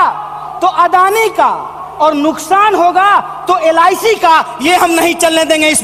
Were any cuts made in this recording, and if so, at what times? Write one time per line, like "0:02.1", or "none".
none